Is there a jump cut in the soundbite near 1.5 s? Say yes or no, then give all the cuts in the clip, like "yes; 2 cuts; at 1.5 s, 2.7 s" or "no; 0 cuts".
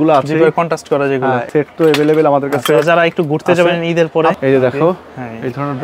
yes; 2 cuts; at 1.5 s, 4.4 s